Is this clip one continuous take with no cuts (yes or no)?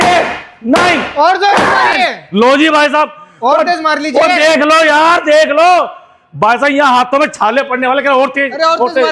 yes